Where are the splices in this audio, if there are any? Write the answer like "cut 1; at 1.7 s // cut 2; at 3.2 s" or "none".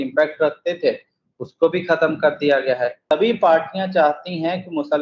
cut 1; at 3.1 s